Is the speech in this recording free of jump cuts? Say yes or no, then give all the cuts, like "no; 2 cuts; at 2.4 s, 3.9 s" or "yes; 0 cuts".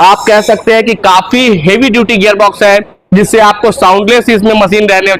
yes; 0 cuts